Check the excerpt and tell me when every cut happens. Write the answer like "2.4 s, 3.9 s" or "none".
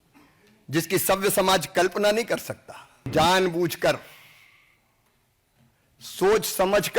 3.1 s

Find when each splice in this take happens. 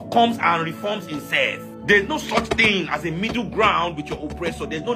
1.7 s

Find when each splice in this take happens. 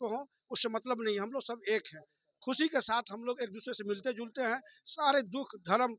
none

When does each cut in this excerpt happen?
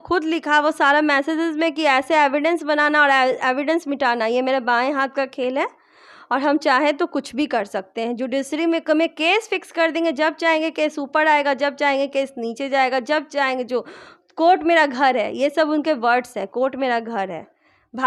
none

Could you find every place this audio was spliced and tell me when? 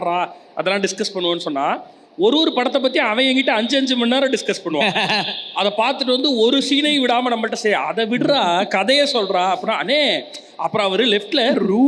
none

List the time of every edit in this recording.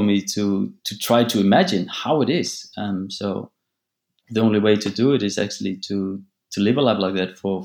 none

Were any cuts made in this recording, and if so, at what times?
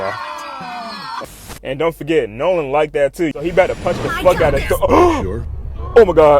1.4 s, 3.3 s

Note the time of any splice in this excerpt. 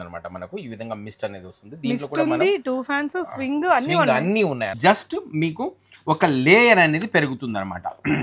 4.7 s

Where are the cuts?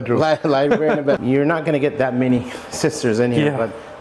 1.2 s

